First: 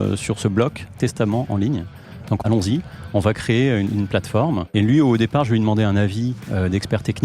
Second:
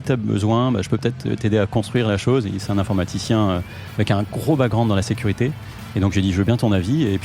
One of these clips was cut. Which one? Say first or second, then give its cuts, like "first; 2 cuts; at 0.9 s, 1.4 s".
first; 2 cuts; at 2.4 s, 4.6 s